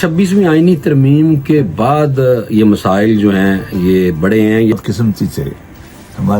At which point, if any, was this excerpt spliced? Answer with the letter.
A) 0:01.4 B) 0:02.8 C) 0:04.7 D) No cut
C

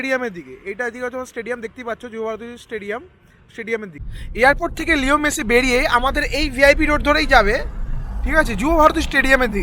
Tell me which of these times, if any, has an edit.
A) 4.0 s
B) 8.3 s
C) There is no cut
A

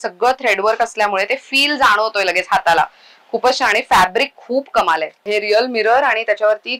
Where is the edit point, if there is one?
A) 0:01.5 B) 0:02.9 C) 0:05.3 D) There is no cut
C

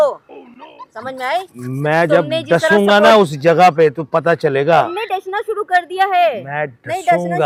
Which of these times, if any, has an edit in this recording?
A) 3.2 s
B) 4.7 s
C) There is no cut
C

